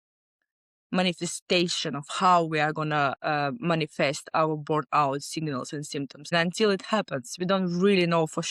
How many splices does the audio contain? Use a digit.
1